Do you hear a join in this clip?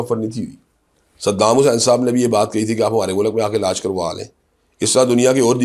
no; 0 cuts

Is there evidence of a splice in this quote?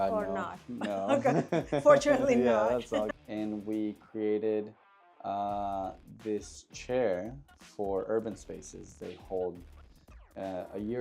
yes; 1 cut; at 3.1 s

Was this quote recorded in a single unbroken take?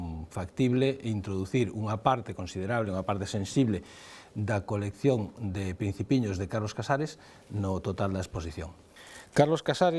yes; 0 cuts

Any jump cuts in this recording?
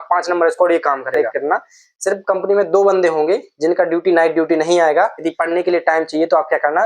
yes; 2 cuts; at 1.2 s, 5.2 s

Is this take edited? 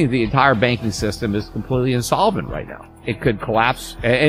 yes; 1 cut; at 3.0 s

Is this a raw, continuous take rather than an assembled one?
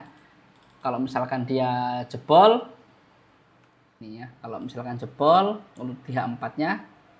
no; 1 cut; at 4.2 s

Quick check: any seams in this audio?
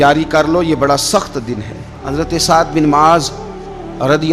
yes; 1 cut; at 2.0 s

